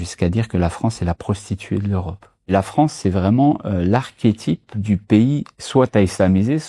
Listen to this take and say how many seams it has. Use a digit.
2